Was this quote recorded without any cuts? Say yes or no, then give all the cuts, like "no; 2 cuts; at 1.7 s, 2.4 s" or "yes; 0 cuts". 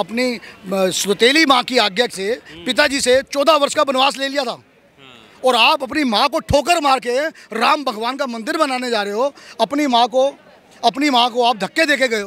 yes; 0 cuts